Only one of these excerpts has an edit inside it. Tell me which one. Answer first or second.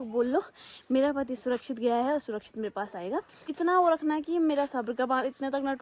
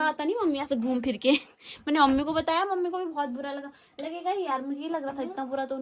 first